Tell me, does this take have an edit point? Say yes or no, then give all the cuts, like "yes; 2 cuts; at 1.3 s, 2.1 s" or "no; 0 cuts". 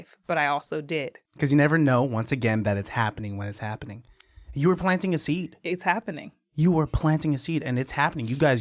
yes; 1 cut; at 1.2 s